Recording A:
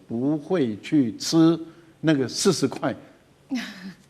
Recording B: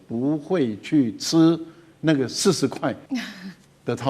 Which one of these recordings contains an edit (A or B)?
B